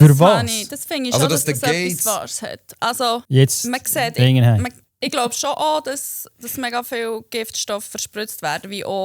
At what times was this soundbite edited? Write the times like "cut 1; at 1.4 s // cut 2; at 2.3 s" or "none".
cut 1; at 3.2 s // cut 2; at 4.9 s